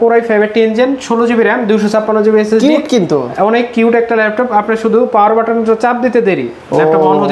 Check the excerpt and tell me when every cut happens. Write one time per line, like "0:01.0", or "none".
none

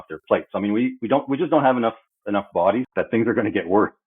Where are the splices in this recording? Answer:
0:02.9

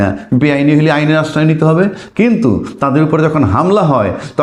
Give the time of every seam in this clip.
none

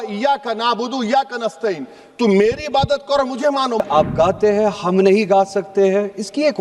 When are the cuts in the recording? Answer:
0:03.8

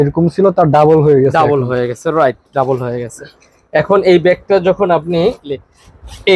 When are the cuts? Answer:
0:05.4

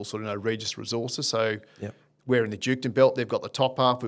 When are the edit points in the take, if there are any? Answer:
none

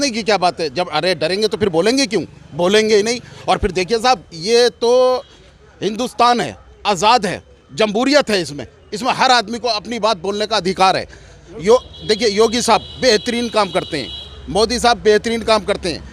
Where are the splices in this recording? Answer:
none

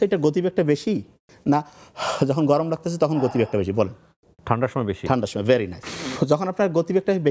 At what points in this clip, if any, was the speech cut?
0:05.8

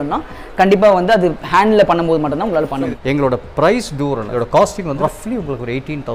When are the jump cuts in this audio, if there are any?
0:02.9
0:04.3
0:05.0

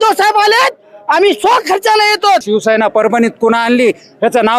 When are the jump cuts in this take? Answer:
0:02.4

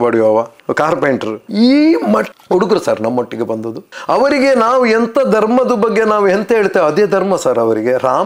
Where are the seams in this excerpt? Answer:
none

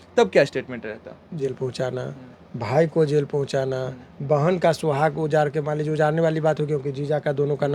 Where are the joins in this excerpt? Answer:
0:01.4

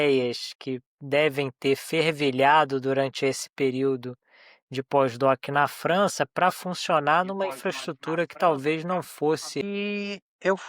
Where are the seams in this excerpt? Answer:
0:09.6

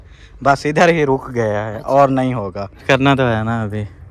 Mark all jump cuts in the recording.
0:02.8

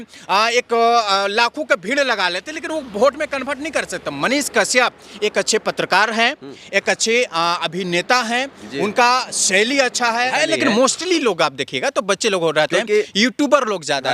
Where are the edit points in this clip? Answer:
0:10.3

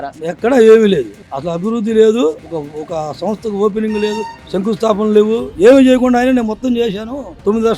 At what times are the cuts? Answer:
0:05.5

